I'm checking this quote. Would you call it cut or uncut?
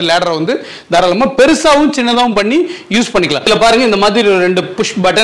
cut